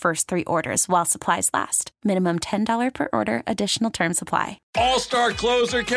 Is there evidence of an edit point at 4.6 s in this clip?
yes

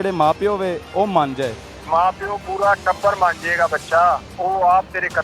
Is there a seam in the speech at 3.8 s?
no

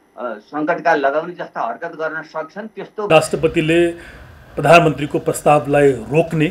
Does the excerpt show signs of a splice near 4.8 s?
no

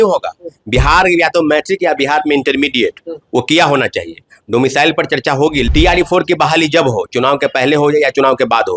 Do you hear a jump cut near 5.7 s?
yes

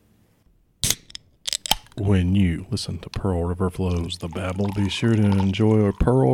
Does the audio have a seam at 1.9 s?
yes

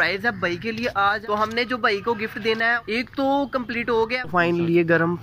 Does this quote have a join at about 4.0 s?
yes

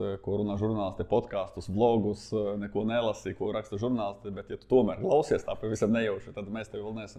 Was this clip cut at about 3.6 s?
no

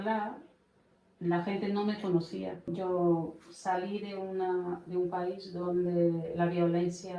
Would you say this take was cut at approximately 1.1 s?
no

